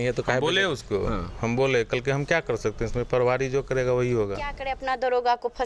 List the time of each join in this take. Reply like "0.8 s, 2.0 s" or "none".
4.7 s